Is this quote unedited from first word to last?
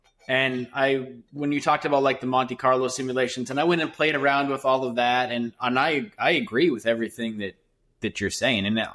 yes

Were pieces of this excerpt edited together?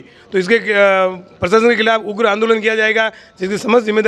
no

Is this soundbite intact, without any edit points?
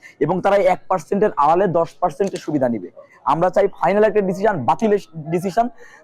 no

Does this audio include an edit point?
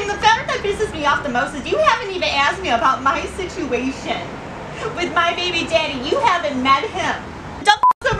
no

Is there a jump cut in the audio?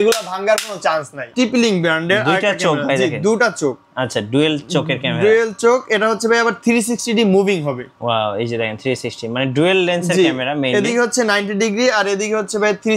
yes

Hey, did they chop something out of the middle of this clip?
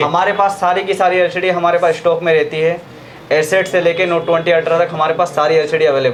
no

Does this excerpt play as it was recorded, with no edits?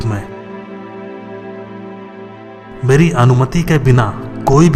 yes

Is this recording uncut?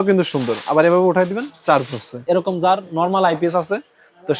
no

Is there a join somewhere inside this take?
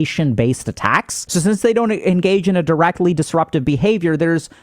yes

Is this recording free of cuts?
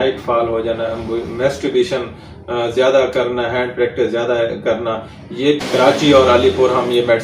no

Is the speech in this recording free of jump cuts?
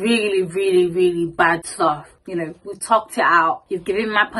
no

